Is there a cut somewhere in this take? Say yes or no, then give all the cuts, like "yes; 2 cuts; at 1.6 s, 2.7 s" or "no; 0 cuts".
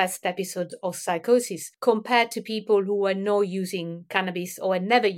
yes; 1 cut; at 1.6 s